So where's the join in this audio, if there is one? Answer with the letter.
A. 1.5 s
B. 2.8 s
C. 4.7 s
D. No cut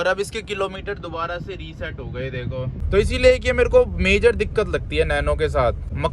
B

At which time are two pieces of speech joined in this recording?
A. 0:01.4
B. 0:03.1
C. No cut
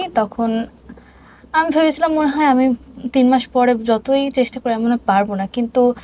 C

